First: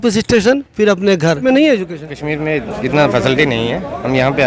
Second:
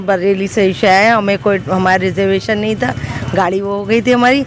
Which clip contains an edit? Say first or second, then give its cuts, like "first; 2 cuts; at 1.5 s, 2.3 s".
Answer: first; 1 cut; at 1.4 s